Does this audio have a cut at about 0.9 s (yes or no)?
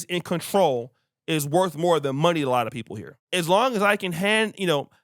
no